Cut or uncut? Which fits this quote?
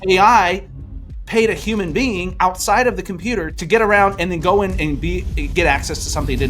cut